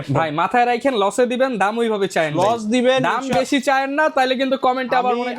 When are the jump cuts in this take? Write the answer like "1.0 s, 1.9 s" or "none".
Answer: none

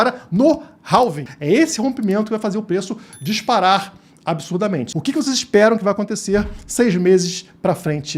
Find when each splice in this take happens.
1.3 s, 4.9 s

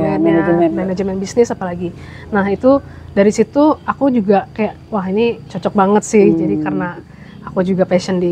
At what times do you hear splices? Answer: none

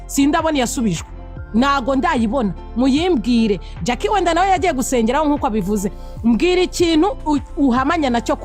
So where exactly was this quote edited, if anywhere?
none

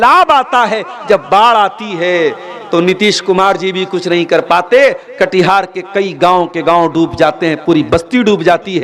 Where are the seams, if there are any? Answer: none

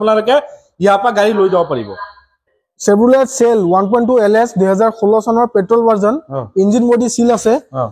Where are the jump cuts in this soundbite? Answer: none

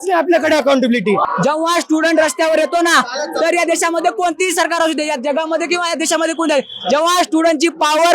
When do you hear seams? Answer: 1.2 s

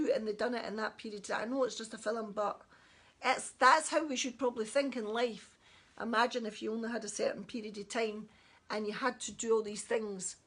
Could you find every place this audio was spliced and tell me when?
none

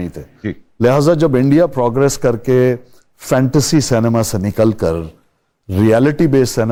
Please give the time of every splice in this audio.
none

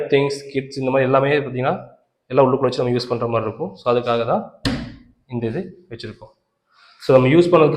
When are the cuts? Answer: none

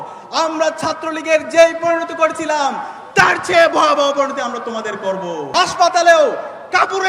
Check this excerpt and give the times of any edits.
5.5 s

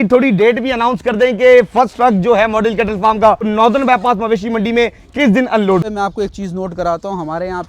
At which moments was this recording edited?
3.5 s, 5.8 s

